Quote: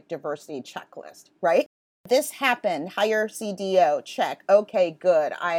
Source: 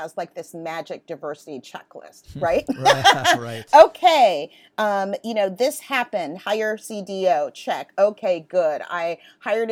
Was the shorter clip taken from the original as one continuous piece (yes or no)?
no